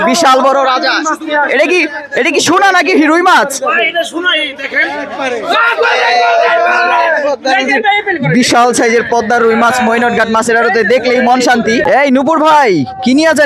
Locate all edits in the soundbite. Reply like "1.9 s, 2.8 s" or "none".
11.9 s